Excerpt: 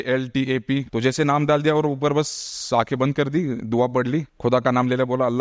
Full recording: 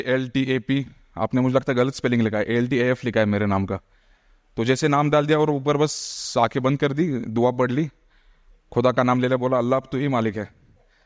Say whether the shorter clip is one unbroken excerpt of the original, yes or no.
no